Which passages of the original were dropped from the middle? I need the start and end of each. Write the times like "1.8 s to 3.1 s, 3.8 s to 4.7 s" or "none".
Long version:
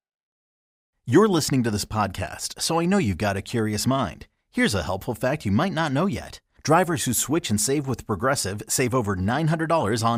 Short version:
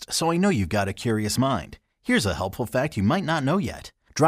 none

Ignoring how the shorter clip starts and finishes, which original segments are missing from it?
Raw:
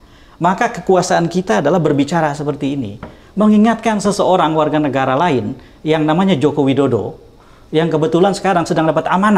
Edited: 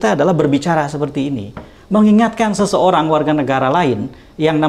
none

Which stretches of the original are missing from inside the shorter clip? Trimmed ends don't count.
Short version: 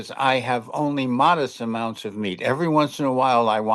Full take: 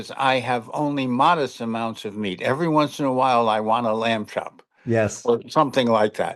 none

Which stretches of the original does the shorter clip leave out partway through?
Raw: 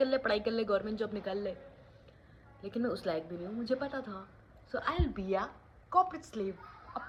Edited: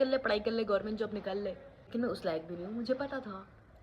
1.7 s to 2.5 s

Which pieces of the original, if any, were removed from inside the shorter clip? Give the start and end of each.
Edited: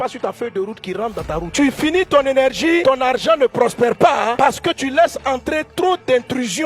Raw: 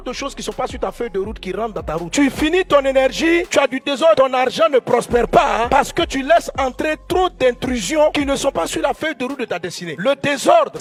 3.4 s to 4.2 s

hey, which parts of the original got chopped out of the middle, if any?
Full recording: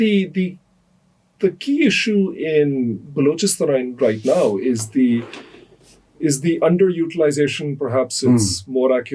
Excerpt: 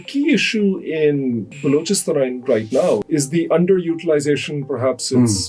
4.6 s to 6.1 s

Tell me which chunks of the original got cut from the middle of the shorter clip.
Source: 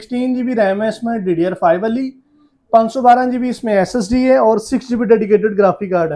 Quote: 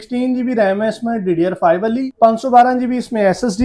2.1 s to 2.6 s

